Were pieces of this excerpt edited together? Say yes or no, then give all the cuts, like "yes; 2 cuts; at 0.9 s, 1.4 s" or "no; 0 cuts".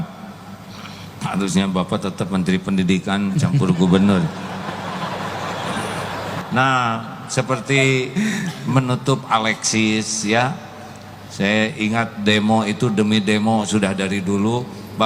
yes; 1 cut; at 6.4 s